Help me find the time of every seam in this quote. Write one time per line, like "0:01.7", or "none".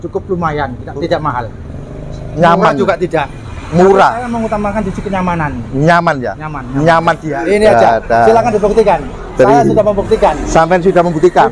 0:07.2